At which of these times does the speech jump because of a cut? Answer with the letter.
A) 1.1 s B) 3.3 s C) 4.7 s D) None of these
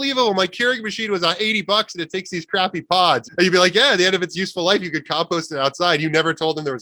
D